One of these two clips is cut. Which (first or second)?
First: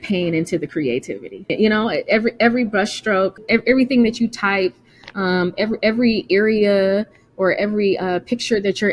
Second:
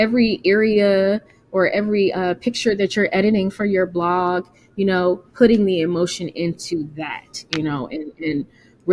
first